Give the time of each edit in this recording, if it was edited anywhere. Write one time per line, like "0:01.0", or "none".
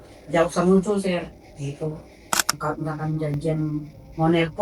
0:02.6

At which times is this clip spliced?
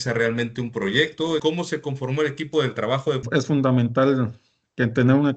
0:01.4
0:03.2

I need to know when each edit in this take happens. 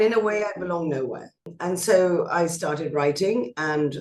0:01.5

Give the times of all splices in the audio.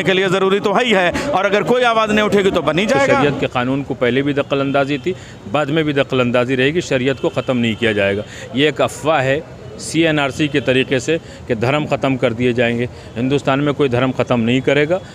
0:03.2

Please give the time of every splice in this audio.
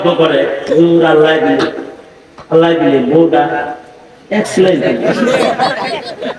none

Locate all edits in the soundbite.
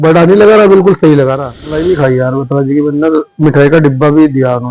0:01.8

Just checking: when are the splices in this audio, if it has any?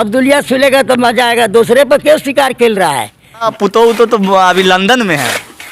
0:03.5

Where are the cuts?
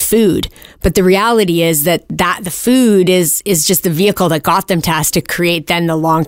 0:05.3

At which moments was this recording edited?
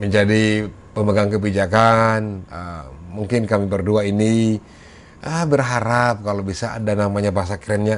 none

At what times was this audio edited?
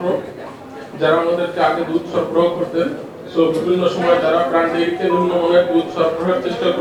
none

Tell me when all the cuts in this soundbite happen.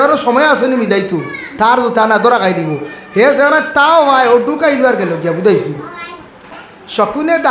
0:06.6

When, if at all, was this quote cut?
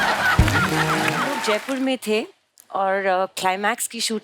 0:01.4

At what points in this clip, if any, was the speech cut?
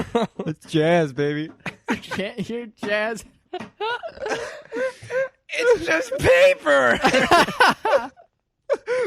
0:03.3

